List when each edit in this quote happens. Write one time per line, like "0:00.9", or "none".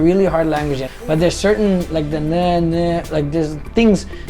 0:00.9

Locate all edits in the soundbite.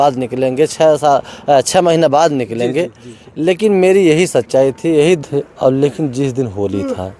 0:05.2

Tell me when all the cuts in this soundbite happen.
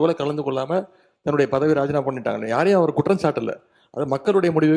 none

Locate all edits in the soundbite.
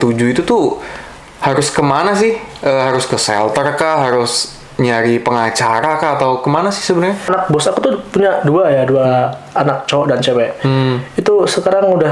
0:07.2

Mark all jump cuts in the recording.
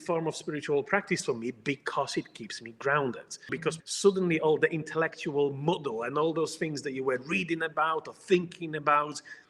0:03.5

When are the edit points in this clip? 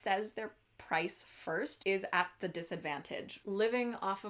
0:01.8
0:03.3

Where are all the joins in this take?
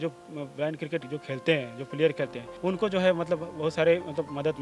0:02.4

